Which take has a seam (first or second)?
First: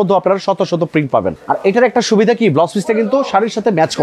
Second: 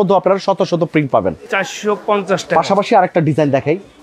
first